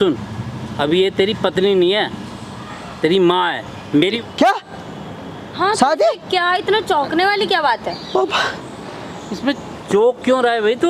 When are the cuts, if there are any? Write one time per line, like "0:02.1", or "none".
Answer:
0:04.2